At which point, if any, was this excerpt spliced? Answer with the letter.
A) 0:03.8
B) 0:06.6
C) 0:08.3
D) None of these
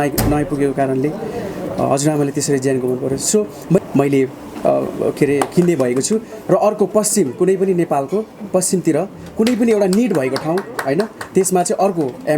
A